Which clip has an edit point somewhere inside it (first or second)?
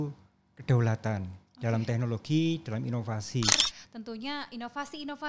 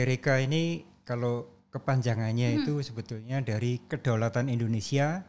first